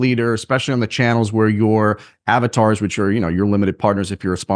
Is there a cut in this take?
no; 0 cuts

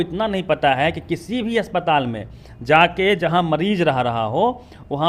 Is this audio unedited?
yes; 0 cuts

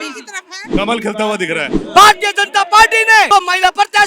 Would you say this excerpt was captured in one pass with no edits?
no; 2 cuts; at 1.8 s, 3.3 s

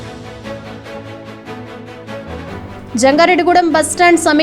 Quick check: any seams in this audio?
yes; 1 cut; at 2.5 s

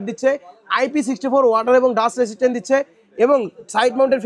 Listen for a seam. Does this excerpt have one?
no; 0 cuts

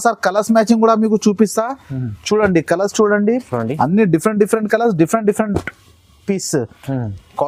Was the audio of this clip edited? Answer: no; 0 cuts

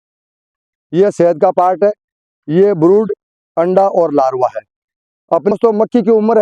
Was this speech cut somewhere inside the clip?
yes; 1 cut; at 5.5 s

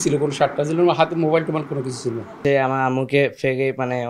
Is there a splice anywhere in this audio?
yes; 1 cut; at 2.4 s

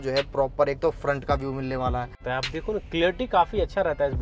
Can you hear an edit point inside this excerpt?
yes; 1 cut; at 2.2 s

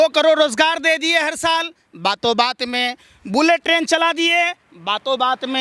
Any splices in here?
no; 0 cuts

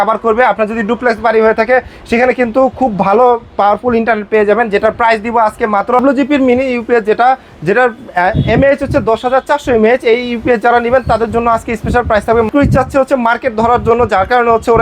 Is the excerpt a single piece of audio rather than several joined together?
no; 2 cuts; at 6.0 s, 12.5 s

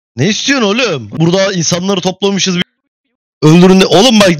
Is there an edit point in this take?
yes; 1 cut; at 1.1 s

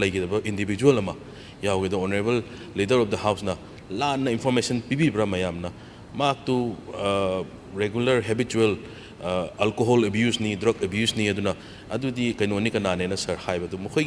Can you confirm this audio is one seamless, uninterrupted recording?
yes; 0 cuts

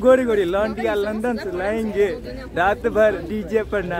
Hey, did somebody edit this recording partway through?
no; 0 cuts

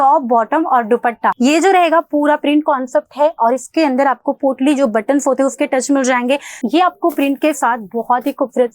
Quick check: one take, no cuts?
no; 2 cuts; at 1.4 s, 6.5 s

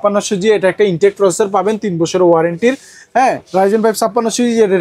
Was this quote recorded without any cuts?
yes; 0 cuts

